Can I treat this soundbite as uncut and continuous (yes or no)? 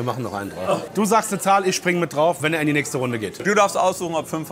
no